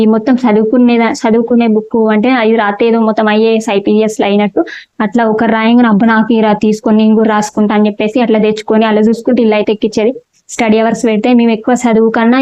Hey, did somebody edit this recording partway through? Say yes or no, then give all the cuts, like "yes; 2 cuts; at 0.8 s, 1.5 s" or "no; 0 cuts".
no; 0 cuts